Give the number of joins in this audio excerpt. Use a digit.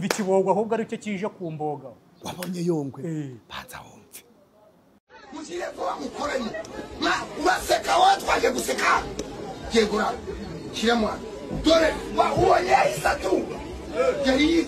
1